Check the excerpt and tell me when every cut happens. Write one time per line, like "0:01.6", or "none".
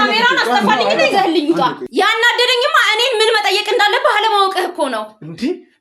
0:01.8